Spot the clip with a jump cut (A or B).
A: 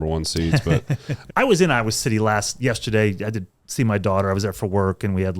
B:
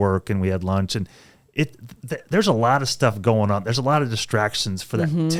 A